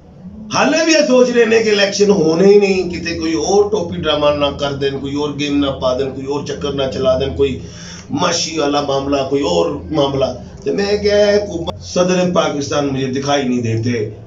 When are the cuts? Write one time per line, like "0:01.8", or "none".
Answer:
0:11.6

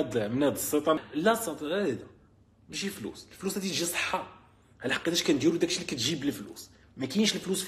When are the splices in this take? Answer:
0:01.0

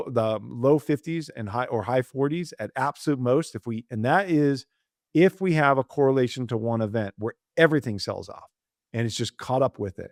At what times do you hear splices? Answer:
none

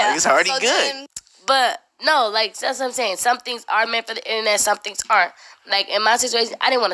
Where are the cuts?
0:01.1

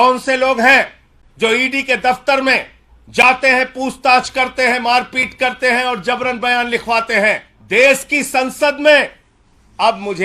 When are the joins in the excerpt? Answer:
0:07.5

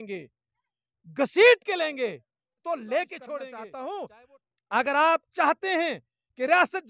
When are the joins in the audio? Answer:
0:03.6

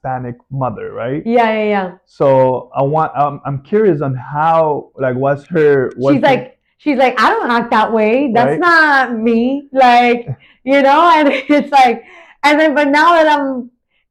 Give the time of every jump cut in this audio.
none

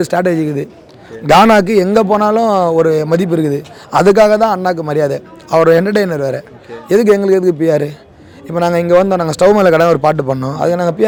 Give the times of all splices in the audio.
none

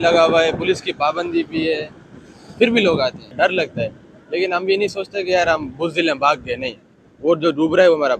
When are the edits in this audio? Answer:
0:03.3

